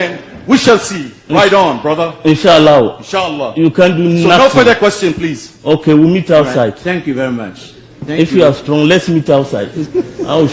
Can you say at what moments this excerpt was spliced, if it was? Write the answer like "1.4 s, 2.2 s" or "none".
none